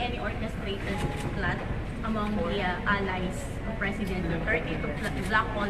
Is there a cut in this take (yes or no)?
yes